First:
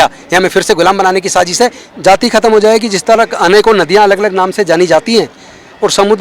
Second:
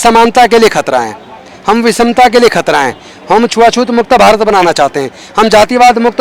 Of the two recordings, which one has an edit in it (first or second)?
first